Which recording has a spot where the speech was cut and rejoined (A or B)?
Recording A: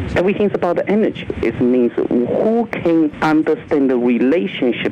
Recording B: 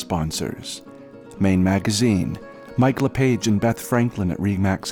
A